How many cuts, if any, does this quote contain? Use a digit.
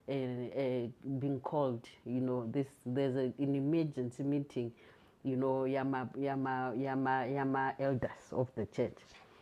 0